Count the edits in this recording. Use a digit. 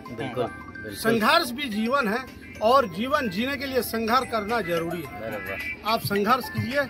0